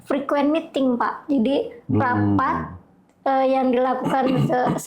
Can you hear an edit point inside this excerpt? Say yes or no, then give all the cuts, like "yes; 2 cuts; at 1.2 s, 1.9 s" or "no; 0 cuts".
no; 0 cuts